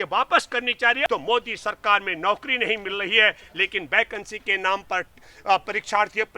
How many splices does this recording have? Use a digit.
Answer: 1